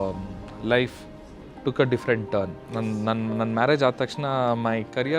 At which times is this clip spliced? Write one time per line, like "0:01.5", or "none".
0:02.8

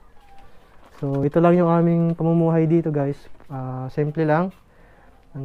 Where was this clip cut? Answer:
none

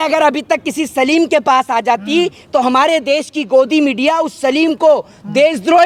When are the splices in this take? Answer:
none

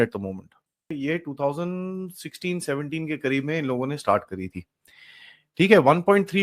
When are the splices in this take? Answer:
0:01.0

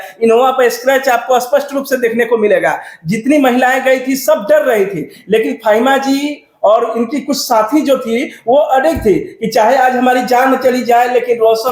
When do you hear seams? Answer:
none

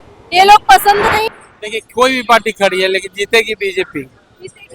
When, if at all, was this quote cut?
0:01.2

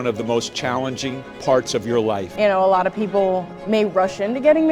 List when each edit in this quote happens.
0:02.3

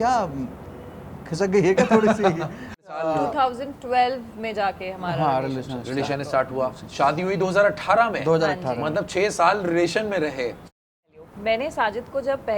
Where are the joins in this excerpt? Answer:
0:02.9
0:11.0

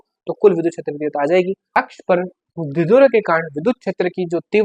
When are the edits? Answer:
0:01.7

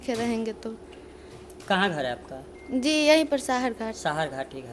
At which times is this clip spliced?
none

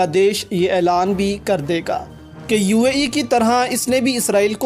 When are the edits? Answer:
none

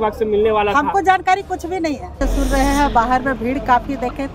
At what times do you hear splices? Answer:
0:02.2

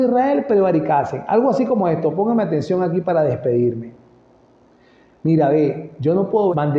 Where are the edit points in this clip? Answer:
none

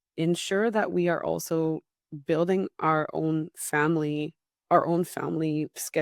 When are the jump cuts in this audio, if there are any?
none

